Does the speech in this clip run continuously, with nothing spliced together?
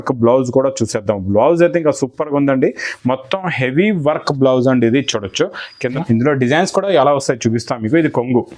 no; 1 cut; at 5.7 s

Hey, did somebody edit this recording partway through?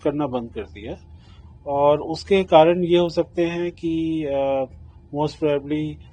no; 0 cuts

